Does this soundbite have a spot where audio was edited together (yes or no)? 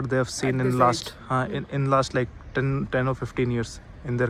no